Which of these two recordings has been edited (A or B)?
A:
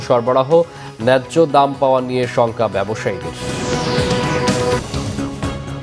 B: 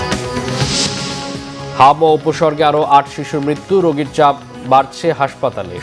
A